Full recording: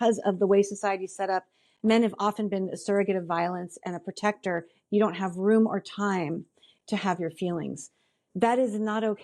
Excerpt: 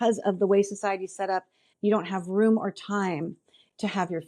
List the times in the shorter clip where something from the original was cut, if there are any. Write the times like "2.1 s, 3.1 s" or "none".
1.6 s